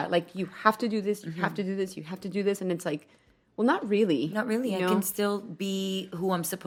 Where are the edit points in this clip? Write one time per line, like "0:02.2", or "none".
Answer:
none